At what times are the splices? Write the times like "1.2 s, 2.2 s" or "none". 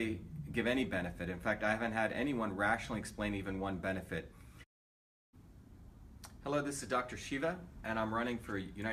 none